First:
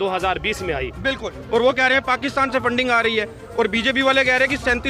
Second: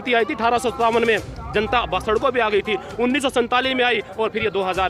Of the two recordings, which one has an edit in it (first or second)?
first